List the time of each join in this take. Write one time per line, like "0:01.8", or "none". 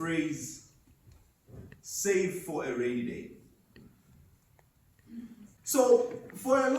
0:05.6